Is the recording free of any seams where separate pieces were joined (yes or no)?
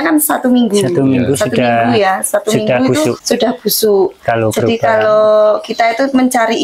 no